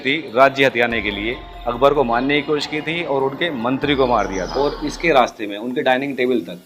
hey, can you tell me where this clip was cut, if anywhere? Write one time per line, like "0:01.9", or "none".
0:04.5

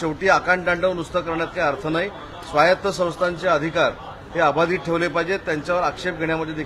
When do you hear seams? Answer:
none

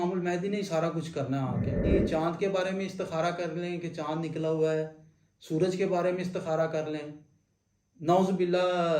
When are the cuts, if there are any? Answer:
0:01.8

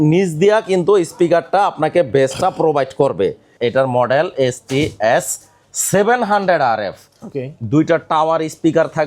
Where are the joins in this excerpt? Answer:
0:03.5

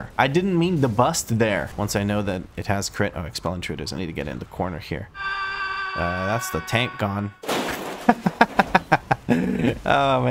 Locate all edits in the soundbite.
0:01.7

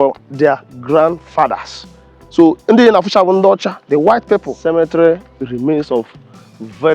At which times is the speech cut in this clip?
0:04.5

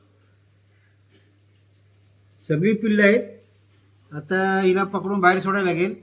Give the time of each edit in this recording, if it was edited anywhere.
none

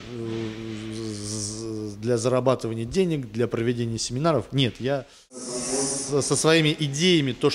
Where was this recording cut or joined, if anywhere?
0:05.5

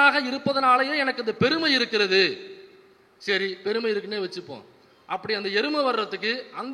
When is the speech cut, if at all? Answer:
none

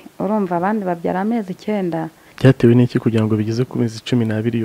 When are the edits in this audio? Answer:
0:02.2

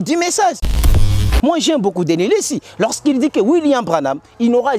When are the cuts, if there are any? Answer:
0:01.1

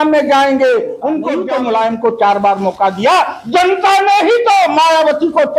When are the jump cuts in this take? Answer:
0:01.3

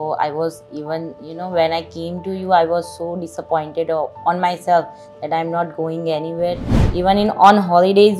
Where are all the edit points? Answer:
0:06.7

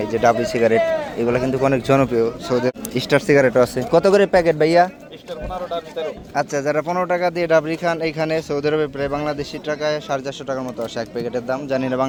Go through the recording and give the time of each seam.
none

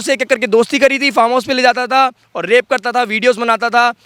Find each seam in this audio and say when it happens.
none

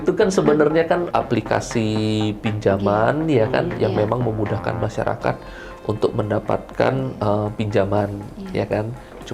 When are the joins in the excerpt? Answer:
0:01.1

